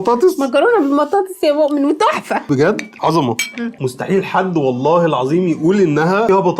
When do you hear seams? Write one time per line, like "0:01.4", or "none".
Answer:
none